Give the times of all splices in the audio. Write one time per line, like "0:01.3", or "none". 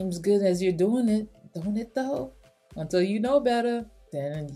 none